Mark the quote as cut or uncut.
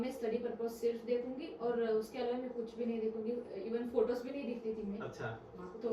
uncut